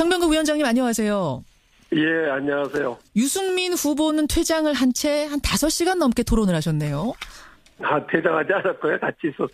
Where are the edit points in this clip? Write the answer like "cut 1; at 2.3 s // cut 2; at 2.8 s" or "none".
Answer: cut 1; at 7.0 s